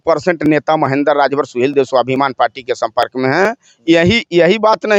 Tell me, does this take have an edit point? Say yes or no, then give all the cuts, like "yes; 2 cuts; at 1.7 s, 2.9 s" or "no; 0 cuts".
no; 0 cuts